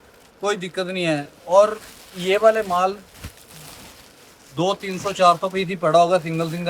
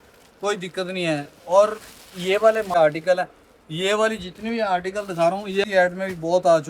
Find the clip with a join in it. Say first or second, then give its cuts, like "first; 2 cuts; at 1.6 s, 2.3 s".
second; 2 cuts; at 2.8 s, 5.6 s